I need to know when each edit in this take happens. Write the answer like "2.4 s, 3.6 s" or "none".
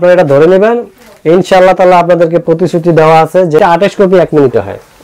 3.6 s